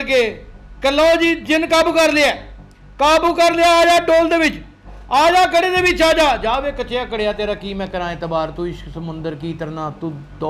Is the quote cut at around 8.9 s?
no; 0 cuts

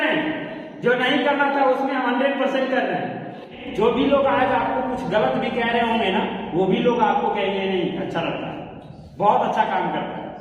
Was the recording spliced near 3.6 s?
yes; 1 cut; at 3.6 s

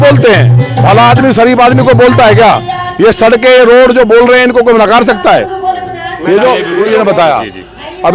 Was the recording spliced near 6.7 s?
yes; 1 cut; at 6.7 s

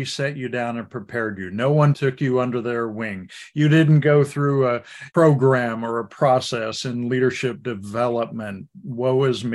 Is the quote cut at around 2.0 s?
yes; 2 cuts; at 2.0 s, 4.9 s

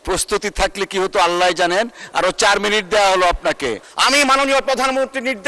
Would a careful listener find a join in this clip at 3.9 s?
yes; 1 cut; at 3.9 s

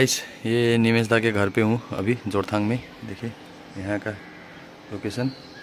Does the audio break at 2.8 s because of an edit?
no; 0 cuts

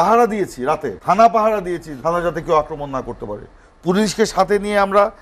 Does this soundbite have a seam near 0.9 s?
yes; 2 cuts; at 0.9 s, 1.9 s

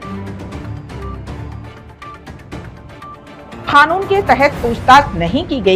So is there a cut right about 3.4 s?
yes; 1 cut; at 3.4 s

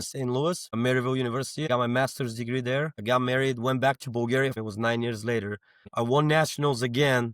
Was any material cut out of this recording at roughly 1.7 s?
yes; 3 cuts; at 1.7 s, 3.0 s, 4.6 s

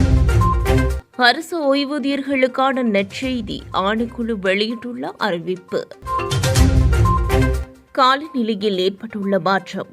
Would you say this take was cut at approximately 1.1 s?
yes; 1 cut; at 1.1 s

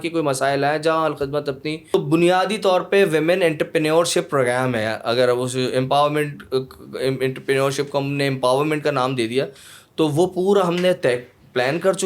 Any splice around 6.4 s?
no; 1 cut; at 1.8 s

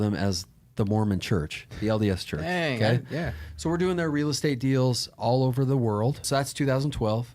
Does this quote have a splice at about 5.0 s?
no; 1 cut; at 6.2 s

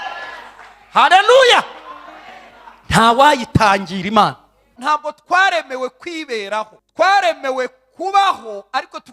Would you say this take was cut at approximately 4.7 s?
yes; 1 cut; at 4.7 s

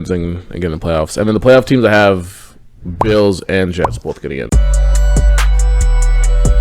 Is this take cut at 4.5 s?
yes; 1 cut; at 4.5 s

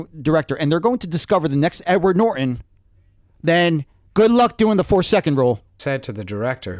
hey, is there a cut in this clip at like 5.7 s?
yes; 1 cut; at 5.7 s

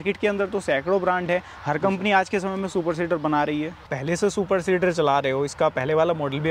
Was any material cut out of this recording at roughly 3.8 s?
yes; 1 cut; at 3.8 s

